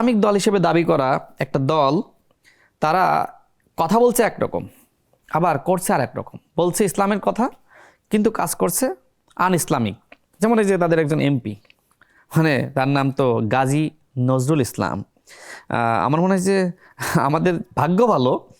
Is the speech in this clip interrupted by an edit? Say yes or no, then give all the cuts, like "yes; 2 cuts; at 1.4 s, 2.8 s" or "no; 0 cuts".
no; 0 cuts